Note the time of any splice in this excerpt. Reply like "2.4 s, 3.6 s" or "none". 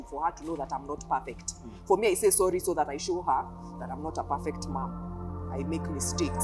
none